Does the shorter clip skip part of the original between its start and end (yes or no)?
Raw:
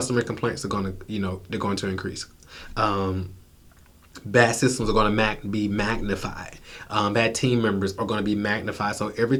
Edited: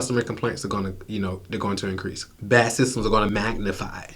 yes